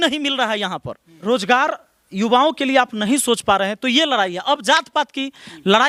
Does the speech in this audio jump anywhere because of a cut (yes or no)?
no